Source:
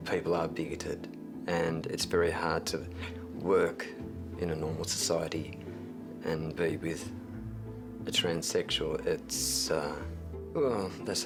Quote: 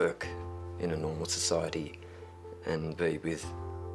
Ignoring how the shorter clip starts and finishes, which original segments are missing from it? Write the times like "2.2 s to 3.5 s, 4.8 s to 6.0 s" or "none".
none